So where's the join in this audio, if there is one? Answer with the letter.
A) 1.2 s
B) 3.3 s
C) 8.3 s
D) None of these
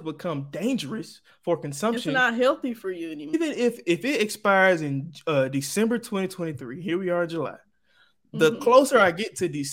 B